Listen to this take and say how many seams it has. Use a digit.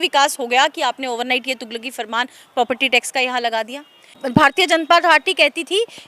1